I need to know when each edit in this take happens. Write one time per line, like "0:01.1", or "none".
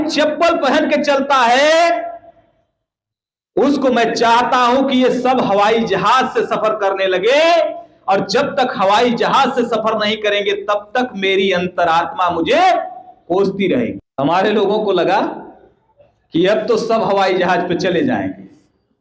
none